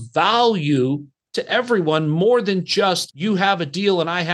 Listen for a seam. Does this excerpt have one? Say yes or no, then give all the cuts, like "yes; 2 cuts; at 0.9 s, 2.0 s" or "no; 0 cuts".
no; 0 cuts